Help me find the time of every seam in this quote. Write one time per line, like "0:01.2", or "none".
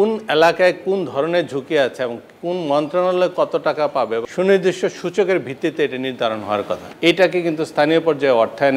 0:04.2
0:06.8